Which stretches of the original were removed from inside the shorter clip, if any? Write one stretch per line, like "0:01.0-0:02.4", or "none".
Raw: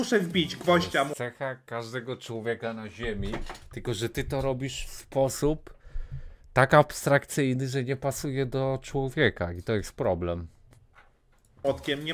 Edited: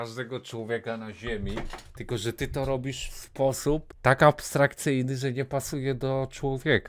0:05.7-0:06.4

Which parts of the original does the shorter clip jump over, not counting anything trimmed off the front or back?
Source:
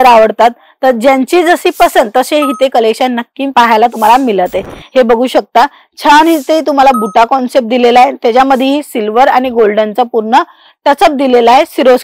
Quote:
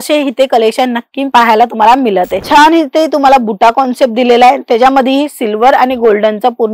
0:04.6-0:05.9

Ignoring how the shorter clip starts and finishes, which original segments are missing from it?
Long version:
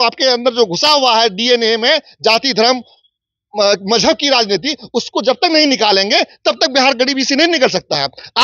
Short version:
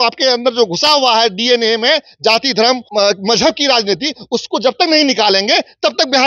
0:02.8-0:03.5

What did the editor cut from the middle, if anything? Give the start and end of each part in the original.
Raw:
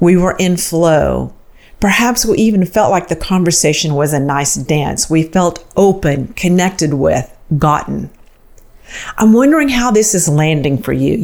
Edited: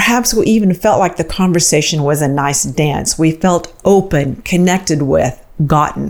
none

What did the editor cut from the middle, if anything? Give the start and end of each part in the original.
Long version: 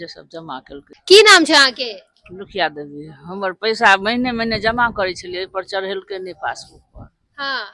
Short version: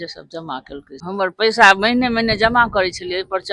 0:00.9-0:03.2

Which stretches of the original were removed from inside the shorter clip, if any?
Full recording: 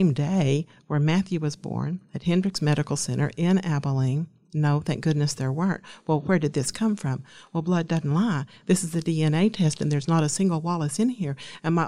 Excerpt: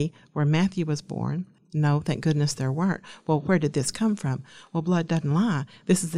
0:02.1-0:04.3

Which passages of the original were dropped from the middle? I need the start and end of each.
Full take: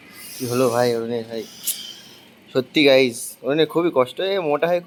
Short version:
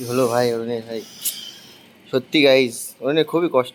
none

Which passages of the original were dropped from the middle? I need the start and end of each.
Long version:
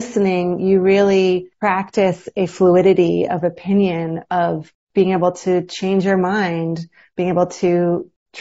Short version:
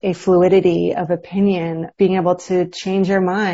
0:04.2-0:04.8

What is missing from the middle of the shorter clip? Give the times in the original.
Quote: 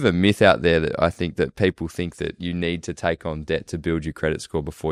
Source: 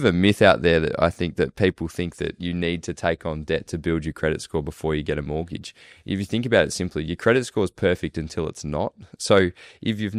none

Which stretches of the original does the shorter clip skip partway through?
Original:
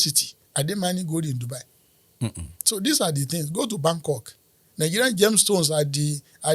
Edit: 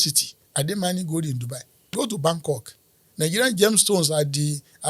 0:01.9-0:03.5

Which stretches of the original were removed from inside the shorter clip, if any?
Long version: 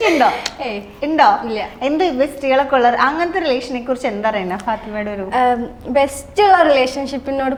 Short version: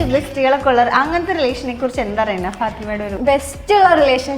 0:05.2-0:05.8

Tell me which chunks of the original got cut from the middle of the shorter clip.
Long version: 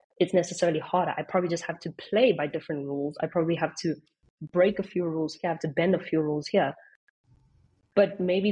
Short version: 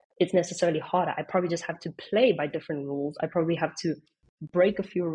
none

